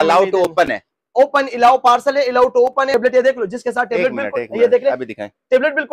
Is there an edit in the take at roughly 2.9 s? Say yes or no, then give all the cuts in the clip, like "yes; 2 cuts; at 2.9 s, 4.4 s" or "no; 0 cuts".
yes; 1 cut; at 2.9 s